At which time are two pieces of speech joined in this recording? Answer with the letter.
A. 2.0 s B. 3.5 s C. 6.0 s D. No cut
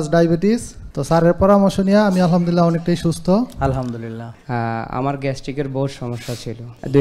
D